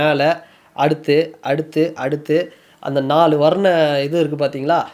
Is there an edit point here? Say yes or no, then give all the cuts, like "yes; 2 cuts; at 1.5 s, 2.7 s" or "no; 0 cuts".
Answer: no; 0 cuts